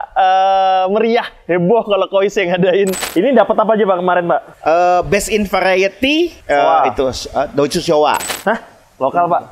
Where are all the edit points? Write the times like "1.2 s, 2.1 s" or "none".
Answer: 3.1 s, 6.4 s, 8.3 s